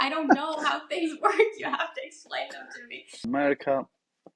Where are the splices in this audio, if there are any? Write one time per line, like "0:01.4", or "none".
0:03.3